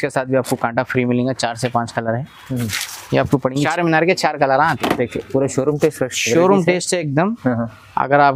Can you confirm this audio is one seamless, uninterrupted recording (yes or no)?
no